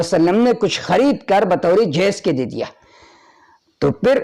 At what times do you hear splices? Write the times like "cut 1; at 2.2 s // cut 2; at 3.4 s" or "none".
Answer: none